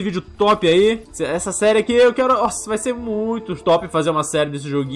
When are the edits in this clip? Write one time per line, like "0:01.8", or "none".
0:01.1
0:03.5